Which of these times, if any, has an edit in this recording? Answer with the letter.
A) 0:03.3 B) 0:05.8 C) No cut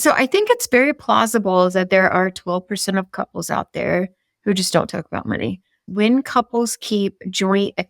B